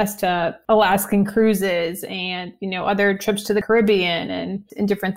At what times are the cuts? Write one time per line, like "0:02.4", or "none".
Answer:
0:03.6